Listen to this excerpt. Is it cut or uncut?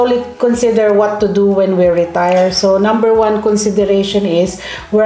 uncut